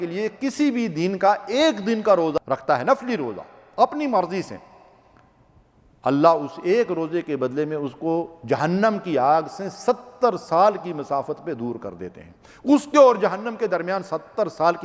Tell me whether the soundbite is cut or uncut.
cut